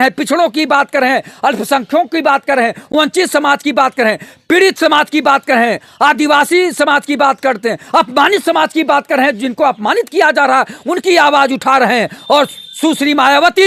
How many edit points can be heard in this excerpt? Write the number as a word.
zero